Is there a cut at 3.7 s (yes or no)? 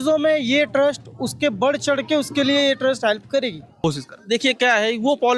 yes